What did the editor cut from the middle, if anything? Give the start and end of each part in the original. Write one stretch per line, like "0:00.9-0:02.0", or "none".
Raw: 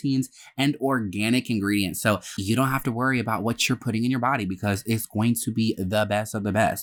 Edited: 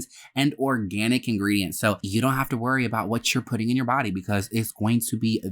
0:02.2-0:02.4